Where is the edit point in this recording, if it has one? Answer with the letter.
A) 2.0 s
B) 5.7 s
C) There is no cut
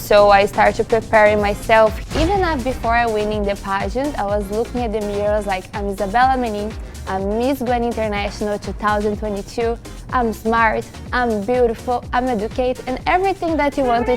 A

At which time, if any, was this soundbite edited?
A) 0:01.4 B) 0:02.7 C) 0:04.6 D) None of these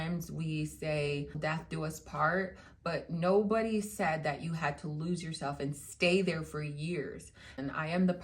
A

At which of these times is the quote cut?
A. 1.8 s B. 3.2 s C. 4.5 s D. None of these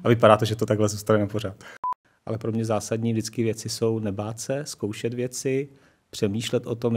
A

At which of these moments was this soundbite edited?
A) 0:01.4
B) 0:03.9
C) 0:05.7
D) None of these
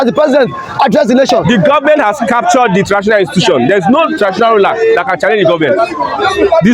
A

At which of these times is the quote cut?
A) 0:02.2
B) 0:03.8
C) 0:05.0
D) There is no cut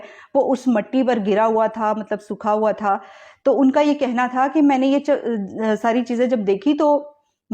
D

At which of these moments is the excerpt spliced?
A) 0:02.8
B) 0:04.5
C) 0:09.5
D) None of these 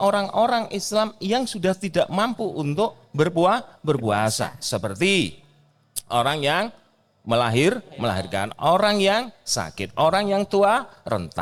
D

